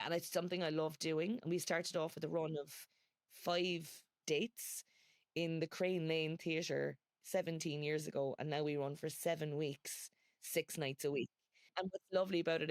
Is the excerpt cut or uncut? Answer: cut